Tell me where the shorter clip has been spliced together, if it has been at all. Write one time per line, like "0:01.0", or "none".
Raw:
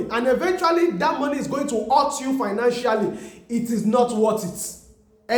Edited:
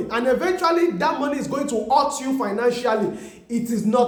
none